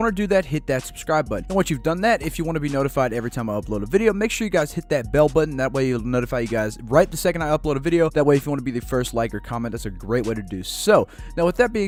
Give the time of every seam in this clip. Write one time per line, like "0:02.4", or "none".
none